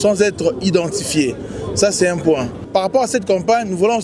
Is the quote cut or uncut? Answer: cut